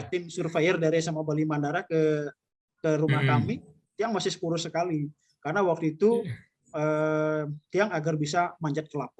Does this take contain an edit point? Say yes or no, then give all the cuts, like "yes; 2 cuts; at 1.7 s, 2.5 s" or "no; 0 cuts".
no; 0 cuts